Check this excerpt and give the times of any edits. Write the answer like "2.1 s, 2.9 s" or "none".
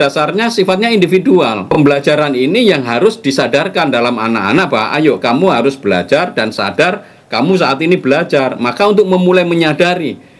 1.6 s